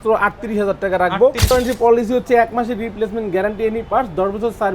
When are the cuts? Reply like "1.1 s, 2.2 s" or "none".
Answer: 1.5 s